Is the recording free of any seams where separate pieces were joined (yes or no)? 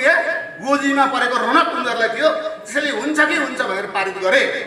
yes